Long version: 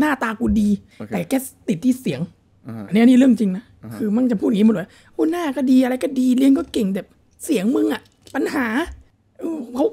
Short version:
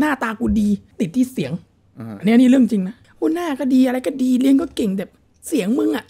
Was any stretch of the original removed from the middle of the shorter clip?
yes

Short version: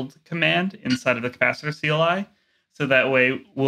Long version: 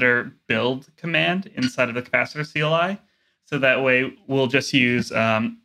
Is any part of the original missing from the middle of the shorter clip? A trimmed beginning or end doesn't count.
no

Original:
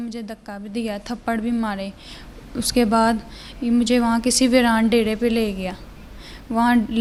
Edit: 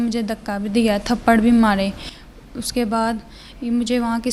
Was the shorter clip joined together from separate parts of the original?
no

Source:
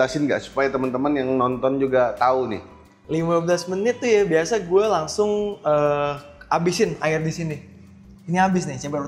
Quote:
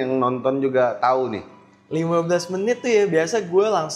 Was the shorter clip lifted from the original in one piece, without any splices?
yes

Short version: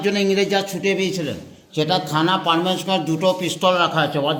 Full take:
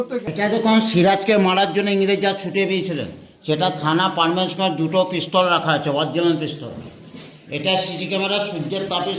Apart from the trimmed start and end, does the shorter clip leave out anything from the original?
no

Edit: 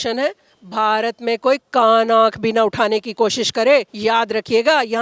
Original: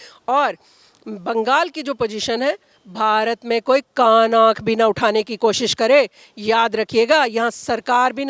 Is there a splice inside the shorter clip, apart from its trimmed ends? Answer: yes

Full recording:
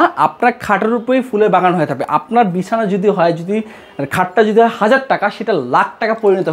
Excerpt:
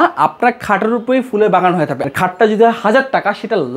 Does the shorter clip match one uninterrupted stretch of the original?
no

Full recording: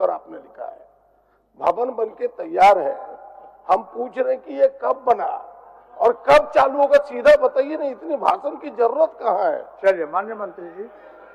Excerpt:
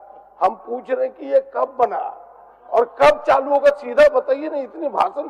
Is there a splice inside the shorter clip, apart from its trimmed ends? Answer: no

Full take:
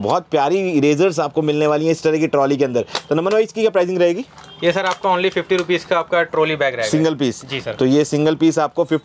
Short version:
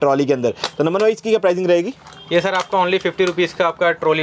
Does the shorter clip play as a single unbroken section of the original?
yes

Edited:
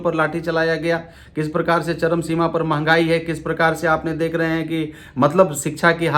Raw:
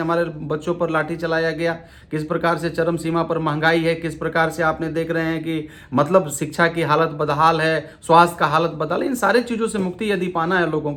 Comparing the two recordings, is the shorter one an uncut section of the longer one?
yes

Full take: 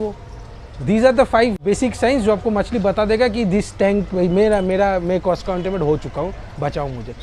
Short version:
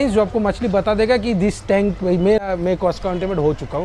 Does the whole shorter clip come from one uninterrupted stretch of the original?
no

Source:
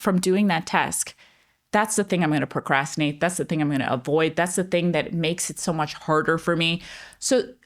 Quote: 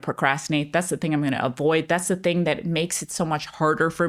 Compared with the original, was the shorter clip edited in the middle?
no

